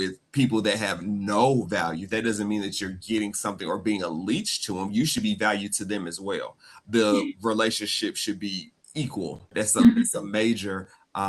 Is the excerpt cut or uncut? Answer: uncut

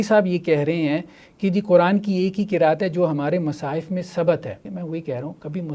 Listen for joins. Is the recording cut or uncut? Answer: cut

